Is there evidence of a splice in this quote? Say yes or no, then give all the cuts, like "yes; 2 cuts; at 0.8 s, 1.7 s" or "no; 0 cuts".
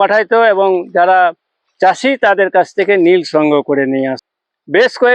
yes; 1 cut; at 4.2 s